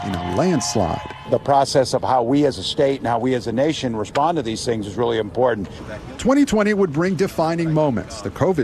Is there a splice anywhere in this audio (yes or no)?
no